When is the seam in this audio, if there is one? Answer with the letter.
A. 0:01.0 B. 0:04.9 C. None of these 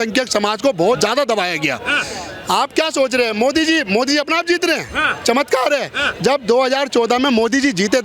A